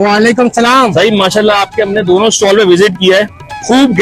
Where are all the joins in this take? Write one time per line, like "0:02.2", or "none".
none